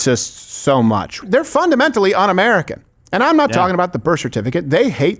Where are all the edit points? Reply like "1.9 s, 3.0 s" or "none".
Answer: 1.2 s